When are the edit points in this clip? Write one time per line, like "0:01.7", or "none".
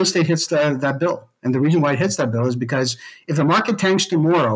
none